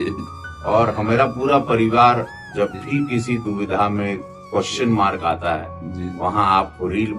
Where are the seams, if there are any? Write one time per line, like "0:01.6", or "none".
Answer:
none